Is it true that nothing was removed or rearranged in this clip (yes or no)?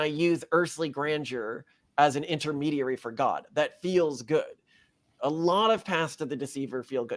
no